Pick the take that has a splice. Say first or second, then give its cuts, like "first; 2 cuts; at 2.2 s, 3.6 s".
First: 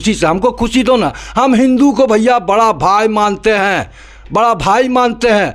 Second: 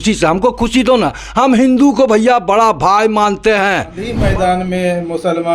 second; 1 cut; at 4.2 s